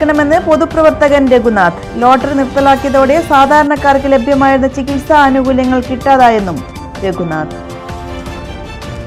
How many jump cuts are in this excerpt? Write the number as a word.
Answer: zero